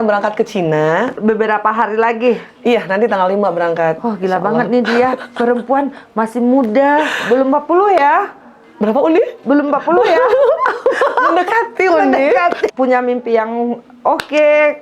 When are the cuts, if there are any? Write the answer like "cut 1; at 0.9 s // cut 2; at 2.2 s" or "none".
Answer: cut 1; at 1.2 s // cut 2; at 12.7 s